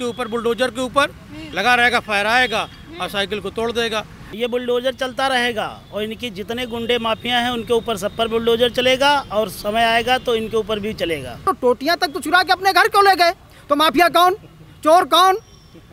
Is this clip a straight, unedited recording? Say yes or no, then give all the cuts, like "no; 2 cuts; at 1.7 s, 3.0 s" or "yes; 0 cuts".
no; 2 cuts; at 4.2 s, 11.4 s